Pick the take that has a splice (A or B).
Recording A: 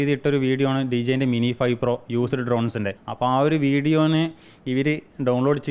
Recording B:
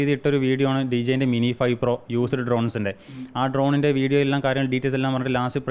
A